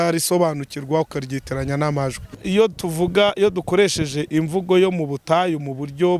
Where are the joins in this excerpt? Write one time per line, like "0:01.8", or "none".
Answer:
0:02.3